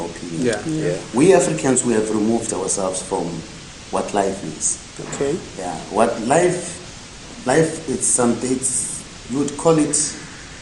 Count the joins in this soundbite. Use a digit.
0